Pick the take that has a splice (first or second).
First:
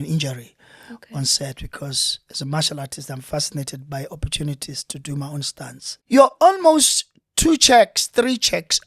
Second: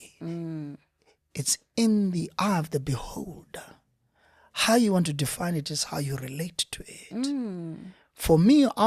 first